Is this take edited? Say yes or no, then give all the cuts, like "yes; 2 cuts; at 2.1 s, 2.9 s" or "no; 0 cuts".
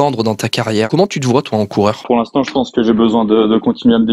yes; 2 cuts; at 0.9 s, 2.0 s